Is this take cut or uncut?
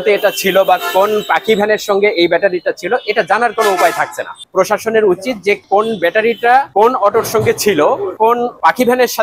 uncut